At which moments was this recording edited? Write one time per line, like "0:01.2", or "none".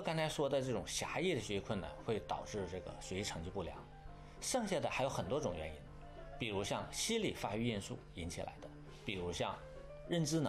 none